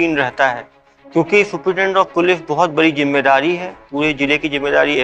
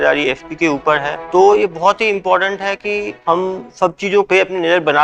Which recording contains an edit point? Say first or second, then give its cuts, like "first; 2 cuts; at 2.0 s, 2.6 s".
second; 3 cuts; at 1.3 s, 3.1 s, 4.3 s